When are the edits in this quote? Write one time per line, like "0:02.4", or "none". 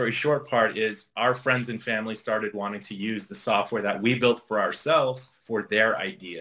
0:01.0
0:05.3